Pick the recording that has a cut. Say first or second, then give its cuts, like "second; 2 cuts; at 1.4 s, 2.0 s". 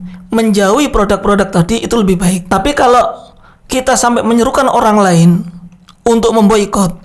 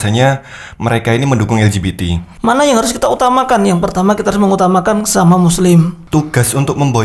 second; 2 cuts; at 2.2 s, 6.0 s